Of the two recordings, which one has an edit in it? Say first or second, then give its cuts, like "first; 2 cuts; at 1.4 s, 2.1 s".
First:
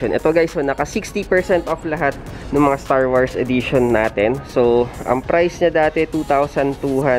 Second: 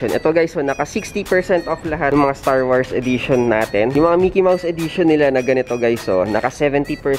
second; 2 cuts; at 2.1 s, 3.9 s